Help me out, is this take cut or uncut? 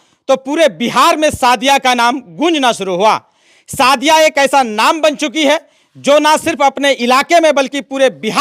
uncut